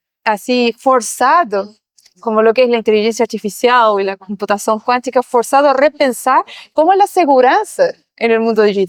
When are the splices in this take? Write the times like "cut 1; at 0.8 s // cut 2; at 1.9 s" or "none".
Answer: none